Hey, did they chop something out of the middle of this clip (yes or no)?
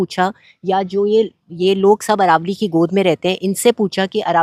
no